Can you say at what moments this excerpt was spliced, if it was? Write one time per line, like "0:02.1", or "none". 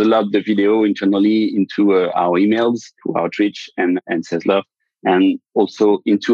0:03.0
0:04.0